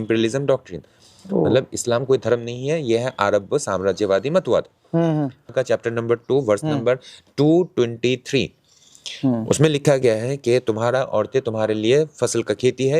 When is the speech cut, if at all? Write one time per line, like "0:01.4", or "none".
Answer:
0:05.5